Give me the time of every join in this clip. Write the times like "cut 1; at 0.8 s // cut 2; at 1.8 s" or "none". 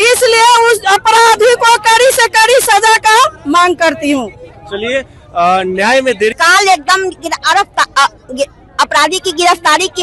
cut 1; at 6.3 s